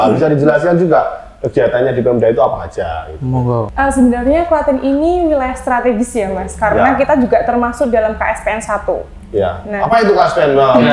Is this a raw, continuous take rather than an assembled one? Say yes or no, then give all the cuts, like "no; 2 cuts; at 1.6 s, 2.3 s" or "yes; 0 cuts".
no; 1 cut; at 3.7 s